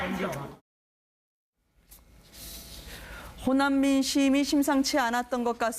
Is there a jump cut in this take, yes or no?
yes